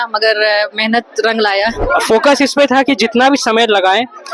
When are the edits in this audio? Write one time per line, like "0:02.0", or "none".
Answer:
0:01.8